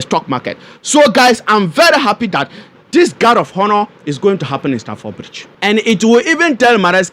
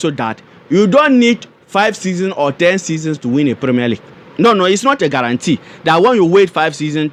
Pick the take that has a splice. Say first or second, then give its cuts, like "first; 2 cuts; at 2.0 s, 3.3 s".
first; 1 cut; at 5.5 s